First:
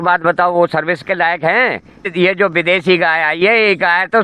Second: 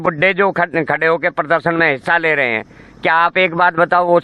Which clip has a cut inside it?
first; 1 cut; at 2.1 s

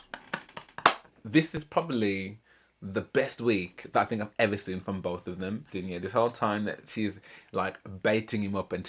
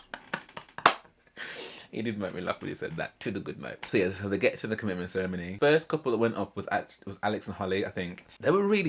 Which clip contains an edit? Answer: first; 2 cuts; at 1.1 s, 5.8 s

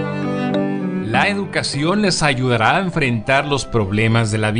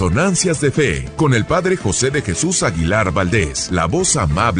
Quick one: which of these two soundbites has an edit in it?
second; 2 cuts; at 1.0 s, 3.6 s

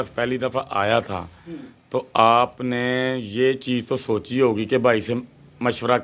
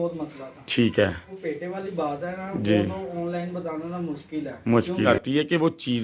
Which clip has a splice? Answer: second; 2 cuts; at 1.3 s, 5.1 s

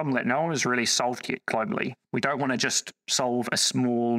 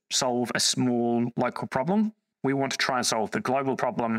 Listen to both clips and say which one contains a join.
first; 1 cut; at 2.0 s

